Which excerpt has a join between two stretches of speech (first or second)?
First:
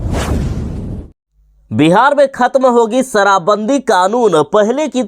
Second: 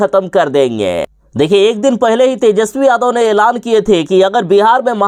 first